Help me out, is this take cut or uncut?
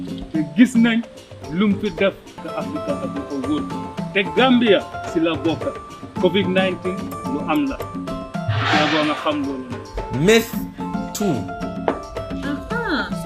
cut